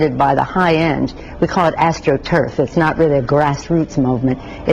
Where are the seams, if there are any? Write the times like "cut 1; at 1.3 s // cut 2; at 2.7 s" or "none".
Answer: cut 1; at 1.7 s